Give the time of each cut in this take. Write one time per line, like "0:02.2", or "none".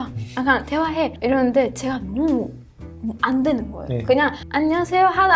0:04.4